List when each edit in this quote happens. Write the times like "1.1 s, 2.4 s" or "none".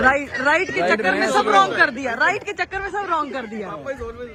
none